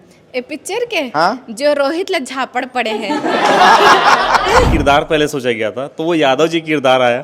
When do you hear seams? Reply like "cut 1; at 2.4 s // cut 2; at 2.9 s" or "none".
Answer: cut 1; at 4.7 s